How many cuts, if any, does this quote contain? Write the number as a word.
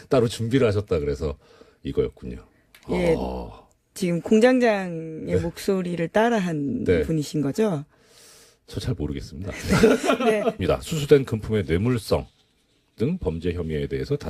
zero